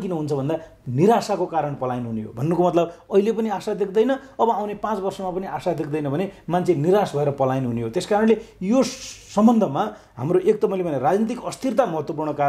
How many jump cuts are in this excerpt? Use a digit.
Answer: 0